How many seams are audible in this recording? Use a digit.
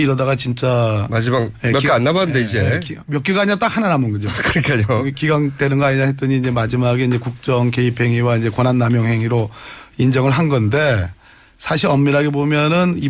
1